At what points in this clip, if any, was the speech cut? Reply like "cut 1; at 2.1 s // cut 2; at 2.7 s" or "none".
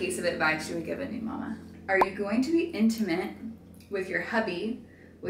cut 1; at 1.7 s